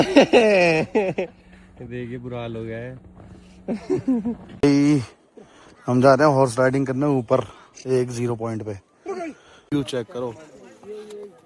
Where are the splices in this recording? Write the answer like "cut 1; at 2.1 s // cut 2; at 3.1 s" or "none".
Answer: cut 1; at 4.6 s // cut 2; at 9.7 s